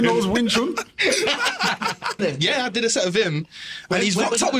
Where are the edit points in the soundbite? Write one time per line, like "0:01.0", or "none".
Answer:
0:02.2